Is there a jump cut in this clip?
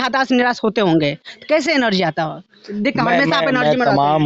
no; 0 cuts

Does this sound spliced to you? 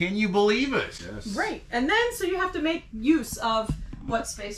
no; 0 cuts

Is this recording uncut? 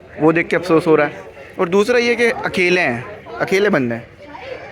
yes; 0 cuts

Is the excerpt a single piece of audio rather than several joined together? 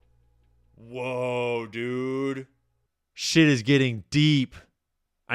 yes; 0 cuts

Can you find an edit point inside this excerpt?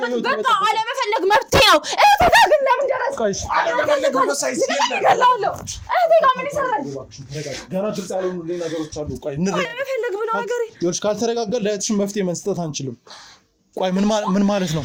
no; 0 cuts

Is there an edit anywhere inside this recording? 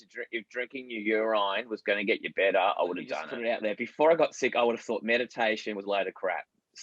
yes; 1 cut; at 3.3 s

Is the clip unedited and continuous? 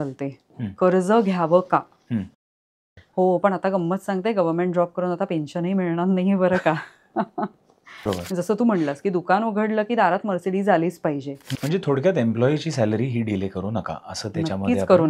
no; 3 cuts; at 2.8 s, 8.1 s, 11.4 s

